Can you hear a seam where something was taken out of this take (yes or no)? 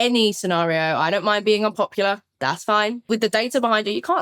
yes